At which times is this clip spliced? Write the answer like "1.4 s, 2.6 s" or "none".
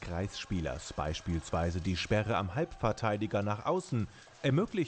none